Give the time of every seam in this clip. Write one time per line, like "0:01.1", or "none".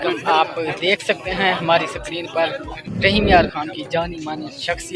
none

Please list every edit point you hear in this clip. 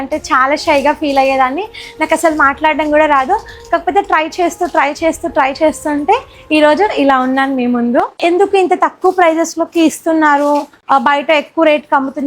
0:08.2
0:10.7

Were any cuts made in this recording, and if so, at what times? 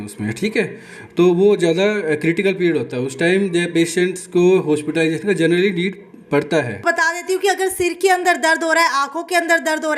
0:06.8

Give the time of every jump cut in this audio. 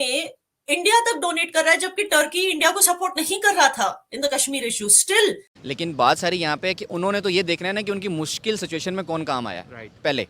0:05.4

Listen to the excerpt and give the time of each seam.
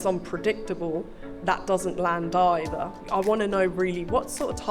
0:02.9

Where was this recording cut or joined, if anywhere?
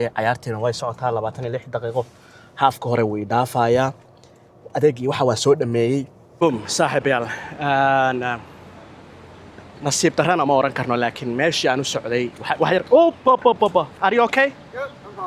0:06.2

